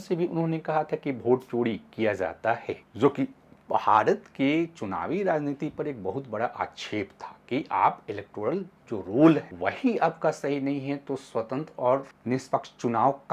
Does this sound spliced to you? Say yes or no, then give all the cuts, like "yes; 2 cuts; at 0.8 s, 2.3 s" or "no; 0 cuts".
yes; 3 cuts; at 2.8 s, 9.5 s, 12.1 s